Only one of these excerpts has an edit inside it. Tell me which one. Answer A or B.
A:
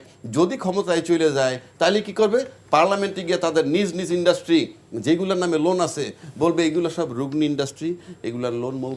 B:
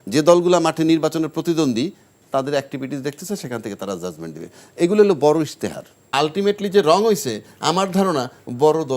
B